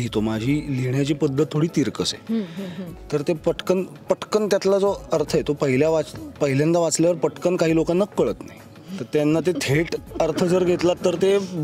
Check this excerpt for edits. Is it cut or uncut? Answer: uncut